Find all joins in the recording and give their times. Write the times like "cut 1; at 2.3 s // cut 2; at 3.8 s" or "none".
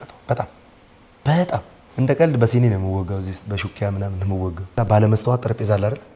cut 1; at 1.8 s // cut 2; at 4.7 s